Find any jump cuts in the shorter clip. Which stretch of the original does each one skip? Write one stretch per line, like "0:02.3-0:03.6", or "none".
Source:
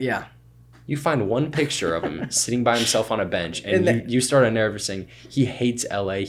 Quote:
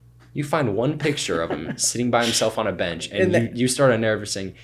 none